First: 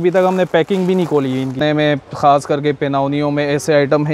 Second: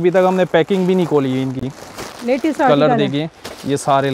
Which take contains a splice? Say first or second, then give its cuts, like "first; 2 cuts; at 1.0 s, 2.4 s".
first; 1 cut; at 1.6 s